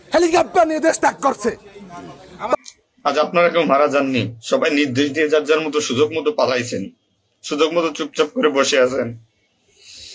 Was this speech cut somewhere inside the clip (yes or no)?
yes